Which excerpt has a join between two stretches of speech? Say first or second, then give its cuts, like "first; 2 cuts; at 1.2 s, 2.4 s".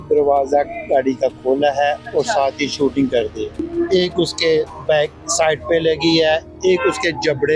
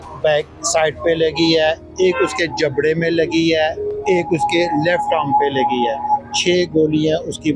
first; 1 cut; at 3.6 s